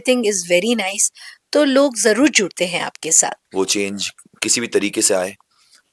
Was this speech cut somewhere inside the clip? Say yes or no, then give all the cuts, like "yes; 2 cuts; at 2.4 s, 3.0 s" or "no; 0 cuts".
yes; 1 cut; at 3.4 s